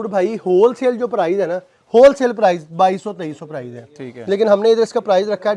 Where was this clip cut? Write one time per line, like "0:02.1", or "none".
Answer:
none